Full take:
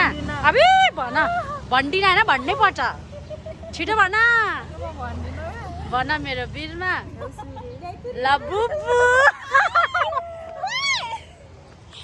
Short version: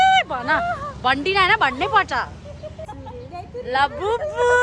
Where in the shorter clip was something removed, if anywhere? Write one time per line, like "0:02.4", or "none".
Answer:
0:02.9